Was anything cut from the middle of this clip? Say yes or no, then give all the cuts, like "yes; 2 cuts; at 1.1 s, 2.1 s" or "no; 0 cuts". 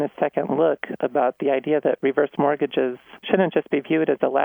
yes; 1 cut; at 3.1 s